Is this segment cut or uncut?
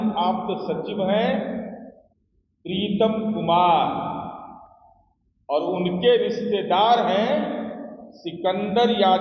uncut